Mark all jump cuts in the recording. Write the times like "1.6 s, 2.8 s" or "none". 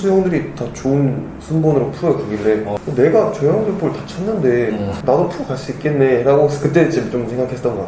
2.8 s, 5.0 s